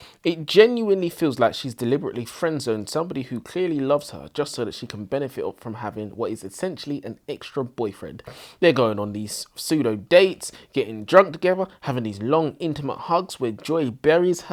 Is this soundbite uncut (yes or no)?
yes